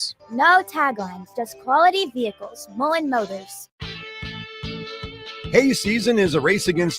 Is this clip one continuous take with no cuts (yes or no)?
no